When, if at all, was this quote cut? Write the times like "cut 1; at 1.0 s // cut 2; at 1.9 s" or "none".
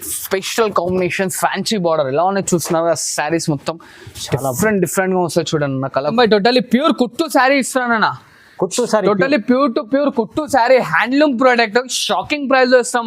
cut 1; at 6.1 s